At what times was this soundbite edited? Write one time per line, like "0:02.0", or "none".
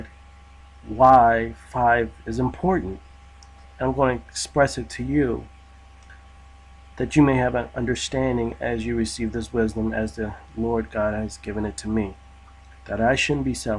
0:07.4

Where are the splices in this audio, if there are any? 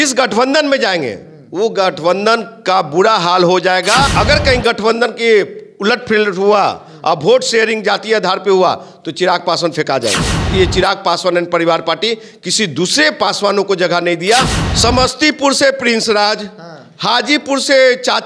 0:04.1
0:10.5
0:14.6

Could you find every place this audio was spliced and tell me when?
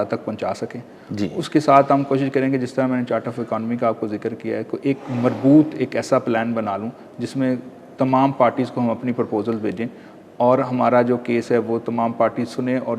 none

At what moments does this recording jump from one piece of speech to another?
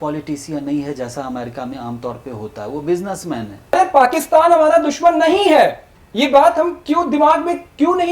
0:03.7

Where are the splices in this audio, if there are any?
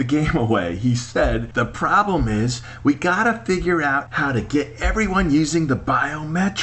0:01.5
0:04.1

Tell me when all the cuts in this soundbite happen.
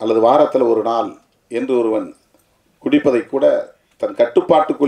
none

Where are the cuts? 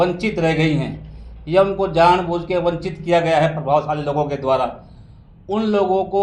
none

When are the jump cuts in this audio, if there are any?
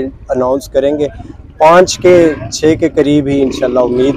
none

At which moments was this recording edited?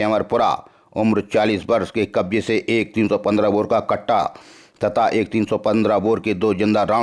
none

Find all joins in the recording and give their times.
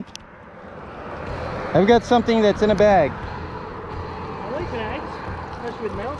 none

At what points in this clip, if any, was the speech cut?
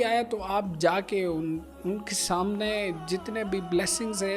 none

